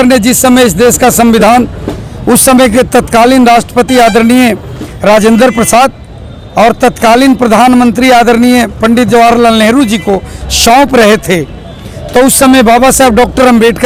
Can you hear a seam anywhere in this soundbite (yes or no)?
no